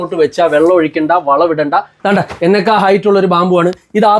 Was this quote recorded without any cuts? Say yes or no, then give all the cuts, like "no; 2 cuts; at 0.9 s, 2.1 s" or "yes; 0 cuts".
no; 1 cut; at 1.9 s